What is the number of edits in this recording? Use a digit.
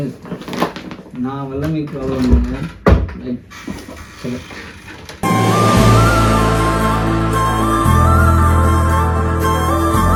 0